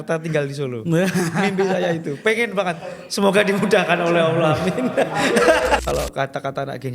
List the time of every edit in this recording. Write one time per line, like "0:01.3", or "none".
0:05.8